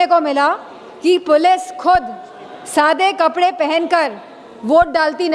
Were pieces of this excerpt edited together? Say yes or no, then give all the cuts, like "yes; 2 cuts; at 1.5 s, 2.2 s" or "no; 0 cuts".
no; 0 cuts